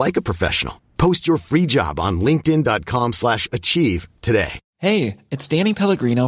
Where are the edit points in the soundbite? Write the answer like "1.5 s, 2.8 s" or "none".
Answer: 4.6 s